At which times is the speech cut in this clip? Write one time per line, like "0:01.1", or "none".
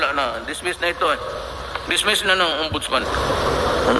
0:03.1